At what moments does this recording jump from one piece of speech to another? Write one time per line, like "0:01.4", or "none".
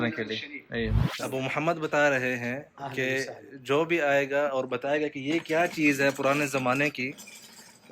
0:01.1